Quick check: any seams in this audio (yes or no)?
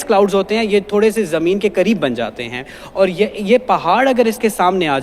no